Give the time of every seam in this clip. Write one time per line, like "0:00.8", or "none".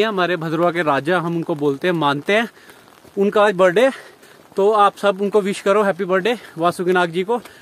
none